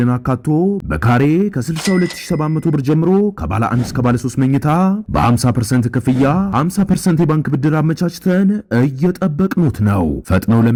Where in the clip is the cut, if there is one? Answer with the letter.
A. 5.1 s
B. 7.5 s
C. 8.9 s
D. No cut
D